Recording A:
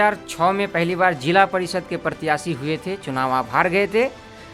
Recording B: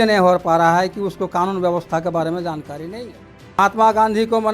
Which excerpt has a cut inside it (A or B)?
B